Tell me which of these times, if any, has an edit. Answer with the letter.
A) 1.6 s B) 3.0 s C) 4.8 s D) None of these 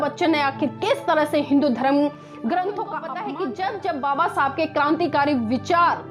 B